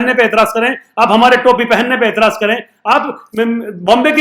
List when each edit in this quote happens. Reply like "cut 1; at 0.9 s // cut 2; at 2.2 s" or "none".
none